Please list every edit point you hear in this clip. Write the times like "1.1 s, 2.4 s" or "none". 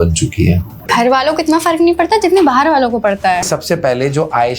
0.8 s, 3.5 s